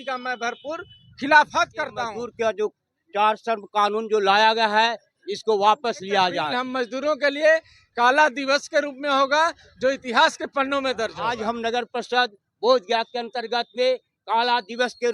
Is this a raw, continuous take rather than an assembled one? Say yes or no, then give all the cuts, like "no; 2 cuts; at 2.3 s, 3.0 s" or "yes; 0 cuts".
no; 3 cuts; at 2.2 s, 6.5 s, 11.4 s